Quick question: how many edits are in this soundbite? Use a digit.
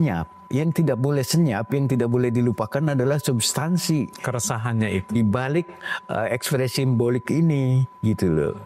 0